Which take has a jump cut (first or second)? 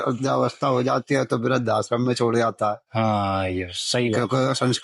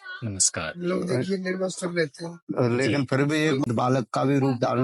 second